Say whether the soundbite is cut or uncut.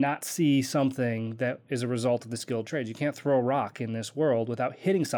uncut